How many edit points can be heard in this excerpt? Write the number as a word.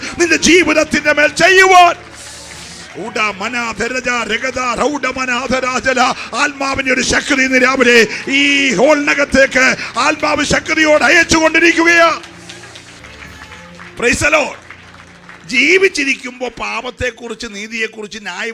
one